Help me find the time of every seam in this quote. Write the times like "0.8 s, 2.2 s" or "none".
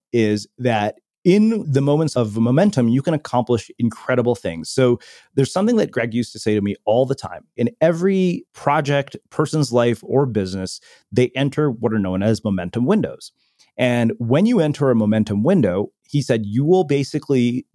2.1 s, 7.5 s, 8.5 s